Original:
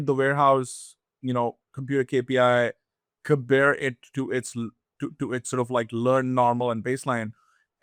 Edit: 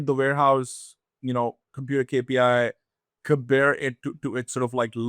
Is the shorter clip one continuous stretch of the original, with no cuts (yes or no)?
no